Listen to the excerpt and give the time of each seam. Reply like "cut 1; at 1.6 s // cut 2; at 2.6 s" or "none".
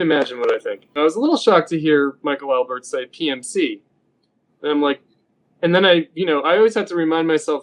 cut 1; at 1.0 s